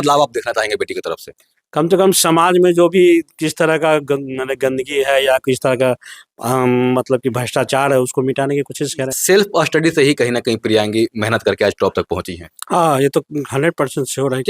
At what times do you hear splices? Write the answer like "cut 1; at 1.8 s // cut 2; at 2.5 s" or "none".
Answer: cut 1; at 9.1 s